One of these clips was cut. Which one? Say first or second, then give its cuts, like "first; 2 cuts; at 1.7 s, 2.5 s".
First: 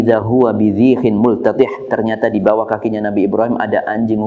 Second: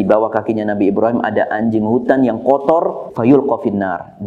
second; 1 cut; at 3.1 s